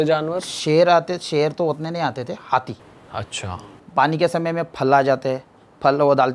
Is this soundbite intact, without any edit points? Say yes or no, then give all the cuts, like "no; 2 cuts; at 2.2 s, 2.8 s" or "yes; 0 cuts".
yes; 0 cuts